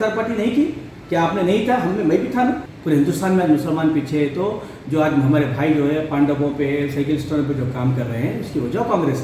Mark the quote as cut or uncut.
cut